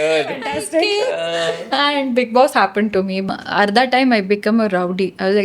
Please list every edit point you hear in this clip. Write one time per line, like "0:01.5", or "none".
0:03.3